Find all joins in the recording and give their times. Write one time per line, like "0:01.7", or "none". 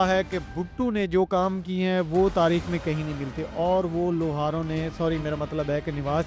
none

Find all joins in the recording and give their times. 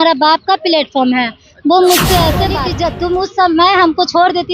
0:02.6

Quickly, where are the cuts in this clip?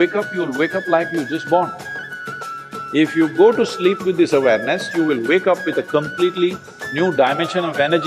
none

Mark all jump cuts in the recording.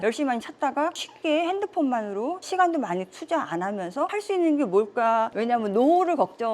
0:00.9
0:02.4
0:04.1
0:05.3

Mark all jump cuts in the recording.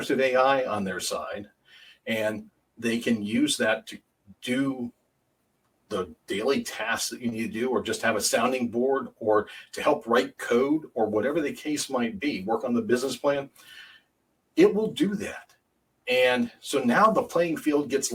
none

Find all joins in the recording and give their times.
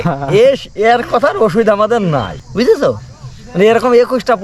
0:02.4

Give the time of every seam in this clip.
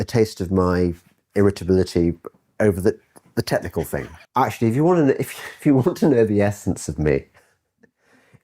0:03.7

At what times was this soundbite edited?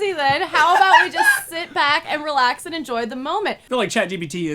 0:03.6

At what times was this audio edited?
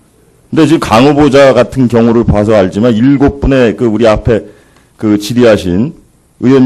0:02.9

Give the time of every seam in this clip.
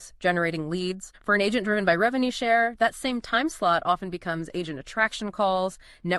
0:01.1

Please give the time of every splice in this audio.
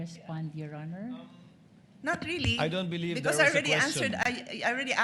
none

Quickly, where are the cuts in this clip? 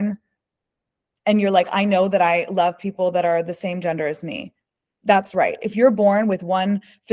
none

